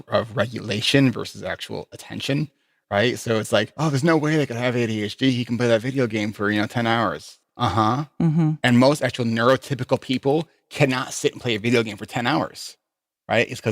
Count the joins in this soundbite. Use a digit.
2